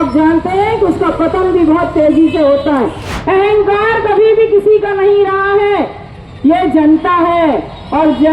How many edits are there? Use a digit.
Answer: 1